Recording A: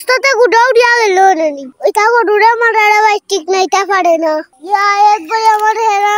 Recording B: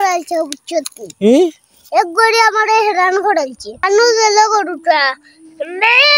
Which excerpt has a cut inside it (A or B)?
A